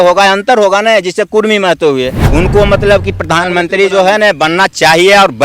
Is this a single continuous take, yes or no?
no